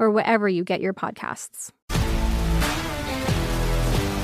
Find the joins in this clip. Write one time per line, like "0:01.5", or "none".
none

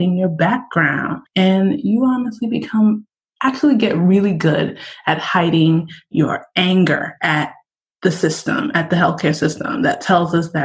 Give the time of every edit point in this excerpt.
0:01.2

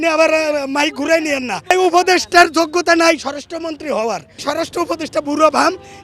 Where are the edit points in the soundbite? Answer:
0:01.7
0:04.4

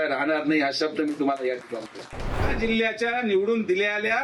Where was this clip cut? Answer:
0:02.5

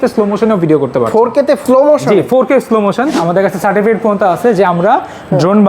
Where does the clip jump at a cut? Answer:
0:03.2

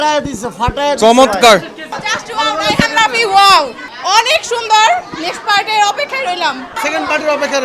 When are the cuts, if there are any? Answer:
0:01.9
0:03.8
0:06.7

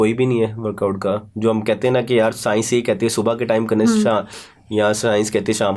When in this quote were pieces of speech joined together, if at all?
none

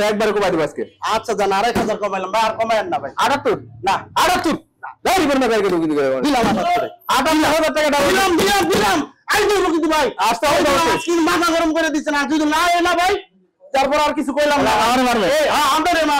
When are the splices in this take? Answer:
none

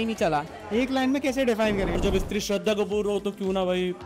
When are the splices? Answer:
0:02.0

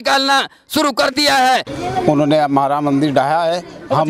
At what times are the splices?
0:01.7

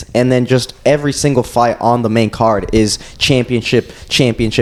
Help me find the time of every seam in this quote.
none

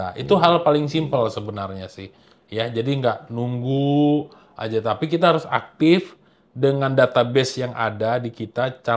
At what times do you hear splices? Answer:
none

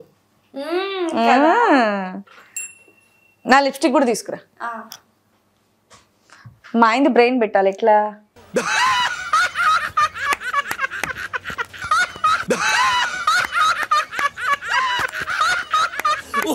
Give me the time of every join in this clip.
none

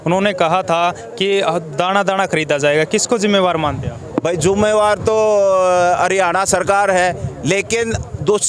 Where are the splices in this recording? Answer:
none

